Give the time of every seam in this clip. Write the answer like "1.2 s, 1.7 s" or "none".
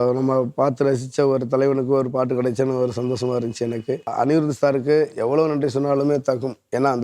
4.1 s